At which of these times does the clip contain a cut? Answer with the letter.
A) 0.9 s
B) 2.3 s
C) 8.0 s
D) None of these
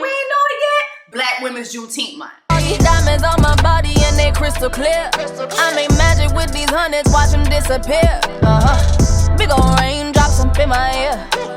B